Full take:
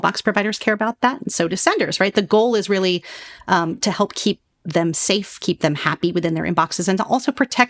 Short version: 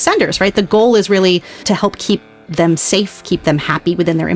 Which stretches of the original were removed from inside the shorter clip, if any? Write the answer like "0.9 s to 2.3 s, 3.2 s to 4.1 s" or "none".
3.2 s to 3.8 s